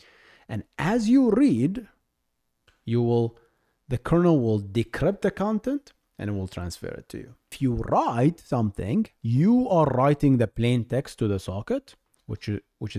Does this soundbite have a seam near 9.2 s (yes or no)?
yes